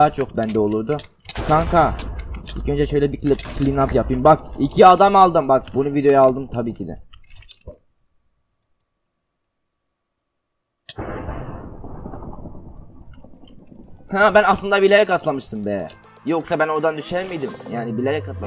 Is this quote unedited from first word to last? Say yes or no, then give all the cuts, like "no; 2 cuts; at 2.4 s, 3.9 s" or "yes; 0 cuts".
yes; 0 cuts